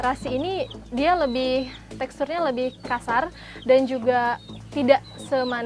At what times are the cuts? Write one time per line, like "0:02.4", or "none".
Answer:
none